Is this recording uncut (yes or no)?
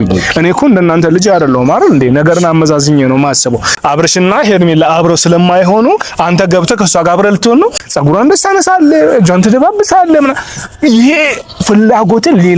no